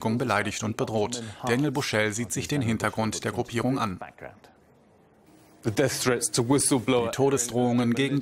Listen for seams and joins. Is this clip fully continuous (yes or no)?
no